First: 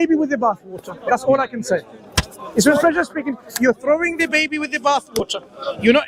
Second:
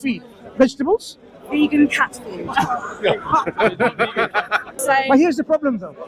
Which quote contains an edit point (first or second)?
second